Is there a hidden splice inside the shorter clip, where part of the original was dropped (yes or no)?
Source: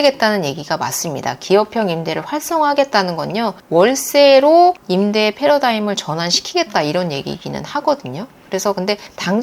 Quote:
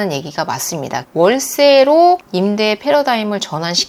yes